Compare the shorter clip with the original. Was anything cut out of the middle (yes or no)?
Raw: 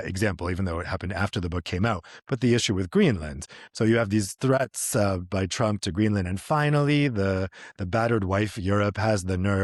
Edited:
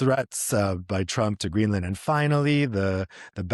no